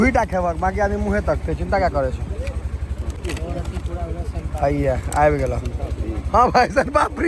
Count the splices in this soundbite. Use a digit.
1